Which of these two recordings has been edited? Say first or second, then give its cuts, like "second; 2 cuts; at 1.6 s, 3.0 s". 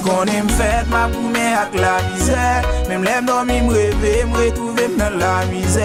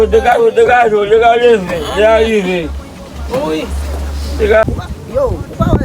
second; 1 cut; at 4.6 s